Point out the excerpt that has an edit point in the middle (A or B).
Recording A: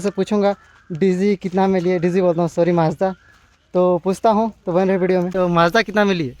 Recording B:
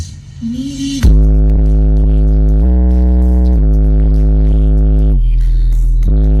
A